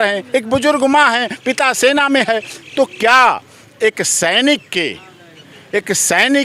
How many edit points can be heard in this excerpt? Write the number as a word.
zero